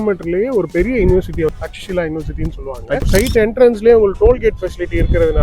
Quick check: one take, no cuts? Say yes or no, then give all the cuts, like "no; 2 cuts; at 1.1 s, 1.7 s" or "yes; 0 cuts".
no; 2 cuts; at 1.5 s, 3.1 s